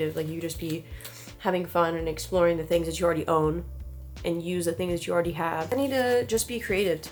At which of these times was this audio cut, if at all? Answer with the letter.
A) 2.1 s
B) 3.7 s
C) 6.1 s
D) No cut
D